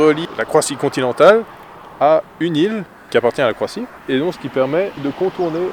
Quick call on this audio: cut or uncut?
cut